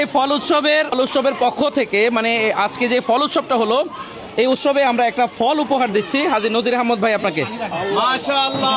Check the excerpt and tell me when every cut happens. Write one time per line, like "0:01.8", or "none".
0:00.9